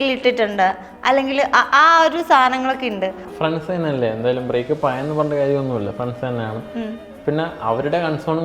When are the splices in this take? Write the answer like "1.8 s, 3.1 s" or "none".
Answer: 3.3 s